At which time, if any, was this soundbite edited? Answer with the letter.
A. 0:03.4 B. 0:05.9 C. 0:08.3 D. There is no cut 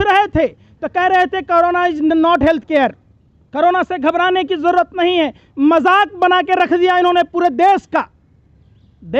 D